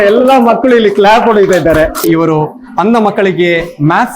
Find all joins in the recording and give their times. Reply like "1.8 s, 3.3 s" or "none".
2.0 s